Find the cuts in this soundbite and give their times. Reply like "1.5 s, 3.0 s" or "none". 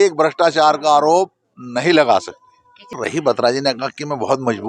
3.0 s